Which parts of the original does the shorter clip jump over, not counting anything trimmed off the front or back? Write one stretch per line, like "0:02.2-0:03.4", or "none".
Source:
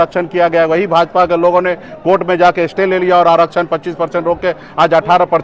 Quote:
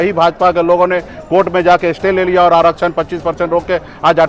none